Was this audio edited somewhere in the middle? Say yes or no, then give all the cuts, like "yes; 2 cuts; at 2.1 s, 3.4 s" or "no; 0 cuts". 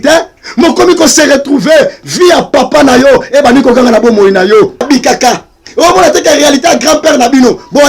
yes; 1 cut; at 4.8 s